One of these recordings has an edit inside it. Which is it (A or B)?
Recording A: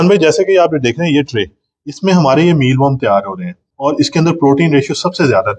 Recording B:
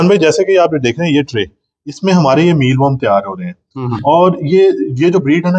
A